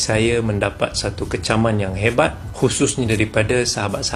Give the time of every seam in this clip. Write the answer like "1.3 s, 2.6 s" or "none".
none